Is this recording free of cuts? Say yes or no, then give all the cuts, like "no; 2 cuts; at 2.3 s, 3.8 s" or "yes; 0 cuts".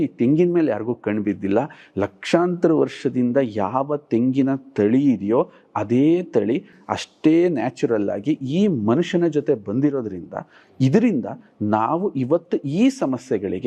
yes; 0 cuts